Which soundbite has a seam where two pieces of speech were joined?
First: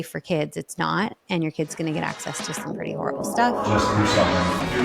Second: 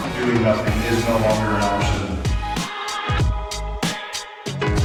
first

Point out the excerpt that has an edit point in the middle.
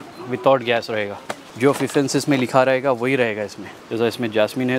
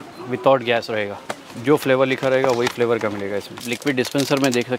second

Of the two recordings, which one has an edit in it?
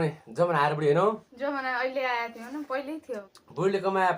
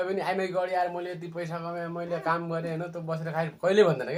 first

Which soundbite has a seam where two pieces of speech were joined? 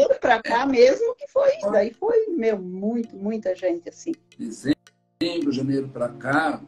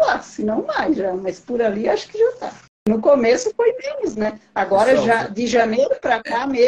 first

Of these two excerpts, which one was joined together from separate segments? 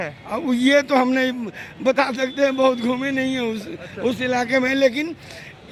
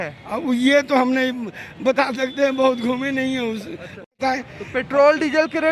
second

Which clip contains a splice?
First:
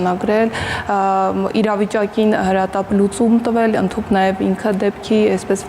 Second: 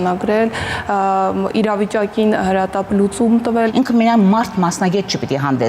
second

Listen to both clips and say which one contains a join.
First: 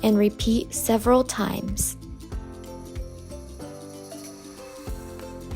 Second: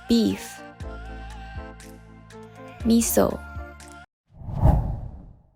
first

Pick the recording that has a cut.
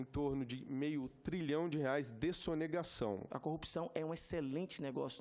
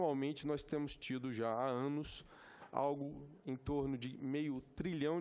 first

